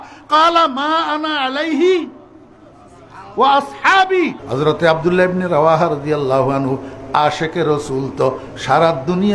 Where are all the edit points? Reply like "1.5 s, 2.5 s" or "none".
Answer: 4.4 s